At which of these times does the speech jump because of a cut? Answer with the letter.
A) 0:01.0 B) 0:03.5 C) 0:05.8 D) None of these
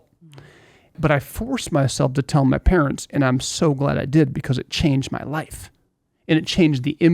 A